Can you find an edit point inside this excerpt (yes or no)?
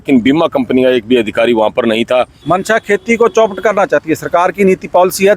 yes